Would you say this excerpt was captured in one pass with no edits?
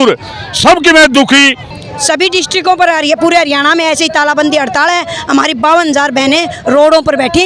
no; 1 cut; at 1.7 s

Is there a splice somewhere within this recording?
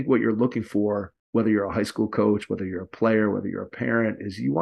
yes; 1 cut; at 1.1 s

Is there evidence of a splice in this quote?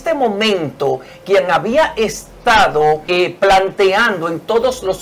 yes; 1 cut; at 3.1 s

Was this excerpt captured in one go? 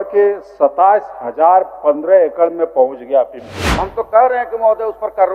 no; 1 cut; at 3.9 s

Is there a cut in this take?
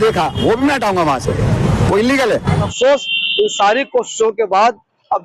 yes; 1 cut; at 2.6 s

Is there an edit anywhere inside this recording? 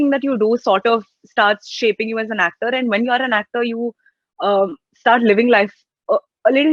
no; 0 cuts

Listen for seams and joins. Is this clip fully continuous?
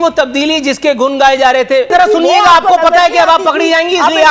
no; 1 cut; at 1.9 s

